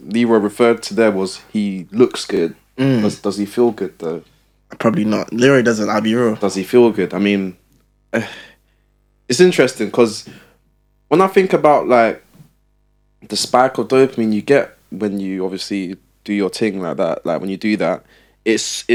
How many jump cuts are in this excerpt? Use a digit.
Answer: 0